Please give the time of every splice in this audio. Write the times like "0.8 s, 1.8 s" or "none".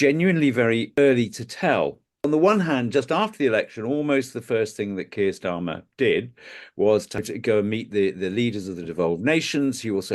1.0 s, 2.1 s, 7.3 s